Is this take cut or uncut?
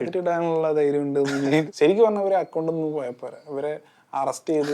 cut